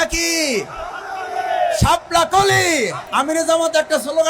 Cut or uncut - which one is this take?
cut